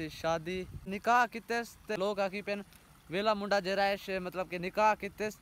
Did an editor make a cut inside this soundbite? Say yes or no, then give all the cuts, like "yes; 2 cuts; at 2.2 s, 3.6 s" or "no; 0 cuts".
yes; 2 cuts; at 0.9 s, 2.0 s